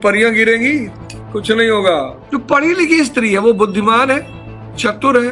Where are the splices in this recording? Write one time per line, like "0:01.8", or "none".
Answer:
0:02.2